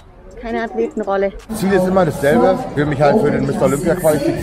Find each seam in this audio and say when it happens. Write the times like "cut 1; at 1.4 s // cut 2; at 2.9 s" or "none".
cut 1; at 1.5 s // cut 2; at 2.7 s